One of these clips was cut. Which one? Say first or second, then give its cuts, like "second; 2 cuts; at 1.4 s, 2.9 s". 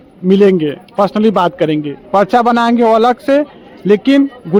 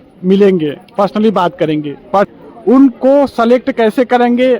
second; 1 cut; at 2.3 s